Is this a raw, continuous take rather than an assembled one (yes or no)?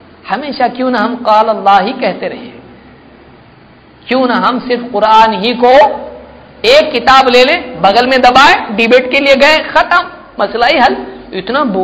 yes